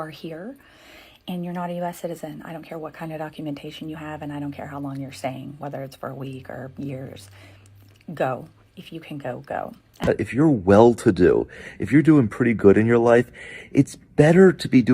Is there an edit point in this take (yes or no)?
yes